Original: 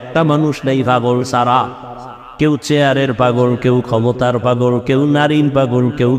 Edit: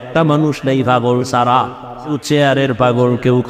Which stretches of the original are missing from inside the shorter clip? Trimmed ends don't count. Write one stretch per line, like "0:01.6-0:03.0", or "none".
0:02.2-0:02.6